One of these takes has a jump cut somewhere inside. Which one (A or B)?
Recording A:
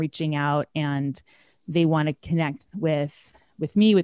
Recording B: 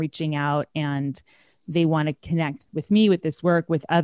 B